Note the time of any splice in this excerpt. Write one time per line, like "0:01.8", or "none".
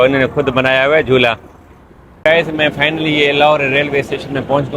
0:02.3